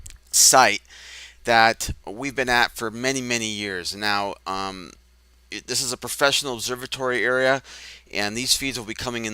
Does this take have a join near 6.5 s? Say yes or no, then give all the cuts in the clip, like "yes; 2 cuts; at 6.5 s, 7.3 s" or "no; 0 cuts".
yes; 1 cut; at 6.5 s